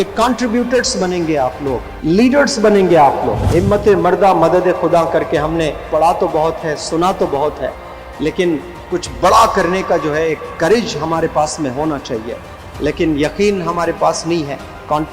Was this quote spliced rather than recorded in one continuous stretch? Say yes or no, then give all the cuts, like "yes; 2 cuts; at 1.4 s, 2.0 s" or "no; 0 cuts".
yes; 2 cuts; at 1.9 s, 3.4 s